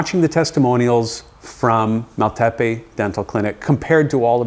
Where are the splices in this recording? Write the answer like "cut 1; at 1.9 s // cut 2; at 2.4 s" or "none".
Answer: none